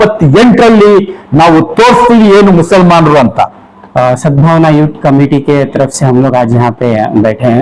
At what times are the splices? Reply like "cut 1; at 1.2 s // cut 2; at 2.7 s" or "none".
none